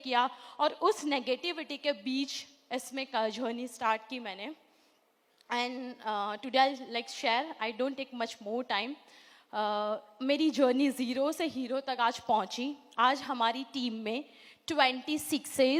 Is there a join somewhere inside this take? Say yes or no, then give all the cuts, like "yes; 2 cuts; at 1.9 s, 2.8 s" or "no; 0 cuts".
no; 0 cuts